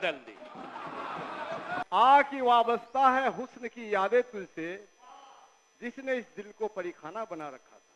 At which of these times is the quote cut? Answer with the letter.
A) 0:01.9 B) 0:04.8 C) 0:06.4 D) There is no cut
A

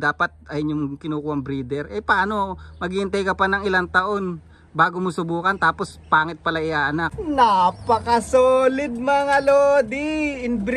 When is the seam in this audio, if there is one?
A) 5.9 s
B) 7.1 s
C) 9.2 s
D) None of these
B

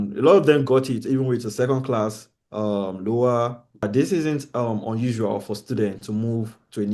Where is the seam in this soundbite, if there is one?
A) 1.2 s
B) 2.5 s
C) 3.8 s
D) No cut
C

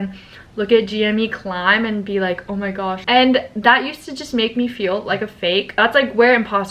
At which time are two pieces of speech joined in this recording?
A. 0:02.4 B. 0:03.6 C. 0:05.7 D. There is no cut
C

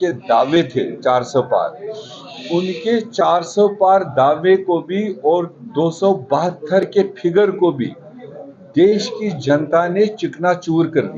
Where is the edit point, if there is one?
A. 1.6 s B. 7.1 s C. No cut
C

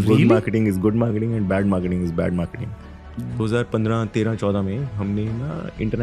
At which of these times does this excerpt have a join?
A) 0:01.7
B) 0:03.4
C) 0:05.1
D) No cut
B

